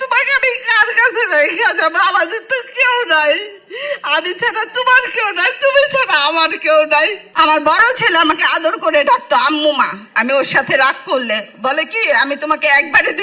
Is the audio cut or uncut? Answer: cut